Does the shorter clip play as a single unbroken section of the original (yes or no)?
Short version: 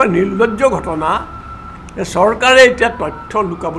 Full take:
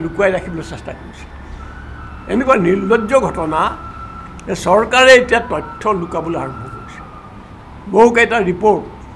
yes